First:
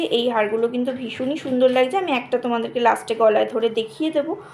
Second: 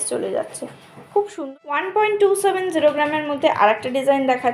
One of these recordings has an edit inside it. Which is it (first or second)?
second